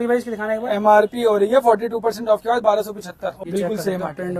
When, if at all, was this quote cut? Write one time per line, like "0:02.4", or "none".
0:03.4